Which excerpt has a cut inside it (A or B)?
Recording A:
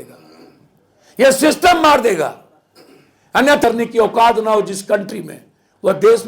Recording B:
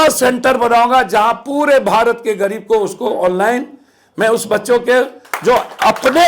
A